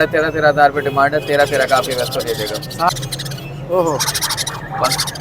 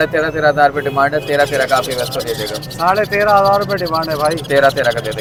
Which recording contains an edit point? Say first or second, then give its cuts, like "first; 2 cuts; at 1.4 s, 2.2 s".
first; 1 cut; at 2.9 s